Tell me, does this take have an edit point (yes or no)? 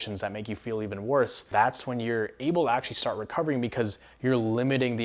yes